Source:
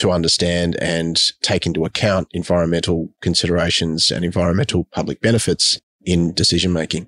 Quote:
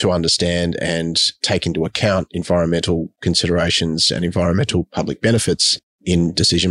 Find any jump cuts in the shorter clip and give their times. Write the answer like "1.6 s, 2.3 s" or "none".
none